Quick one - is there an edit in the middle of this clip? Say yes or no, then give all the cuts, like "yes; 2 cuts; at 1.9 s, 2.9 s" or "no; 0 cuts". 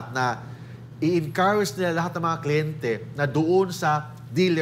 no; 0 cuts